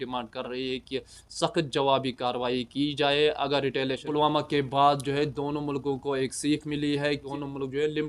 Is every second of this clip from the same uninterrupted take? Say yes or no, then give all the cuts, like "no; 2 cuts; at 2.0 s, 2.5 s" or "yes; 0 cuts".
no; 1 cut; at 4.0 s